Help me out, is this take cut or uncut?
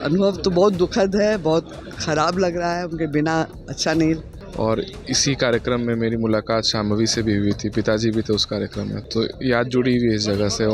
cut